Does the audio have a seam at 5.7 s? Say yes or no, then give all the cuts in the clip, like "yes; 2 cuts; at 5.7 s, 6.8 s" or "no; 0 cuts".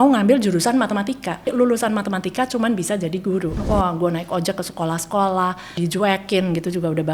yes; 3 cuts; at 1.5 s, 3.6 s, 5.7 s